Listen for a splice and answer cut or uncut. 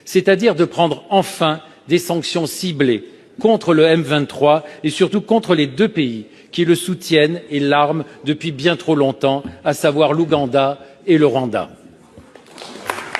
uncut